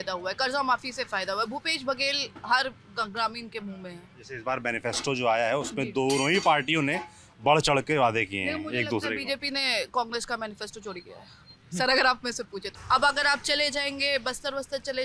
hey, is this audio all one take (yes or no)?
yes